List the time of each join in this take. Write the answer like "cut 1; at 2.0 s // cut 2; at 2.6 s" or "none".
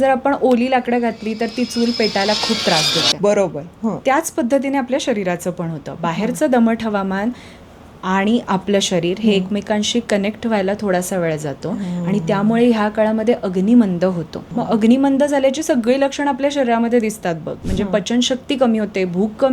cut 1; at 14.4 s